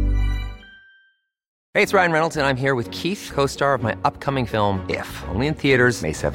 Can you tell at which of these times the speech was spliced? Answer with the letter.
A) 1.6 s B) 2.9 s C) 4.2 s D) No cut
A